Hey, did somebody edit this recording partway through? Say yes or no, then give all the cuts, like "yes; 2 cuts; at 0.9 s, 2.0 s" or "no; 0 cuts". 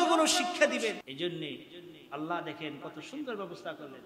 yes; 1 cut; at 1.0 s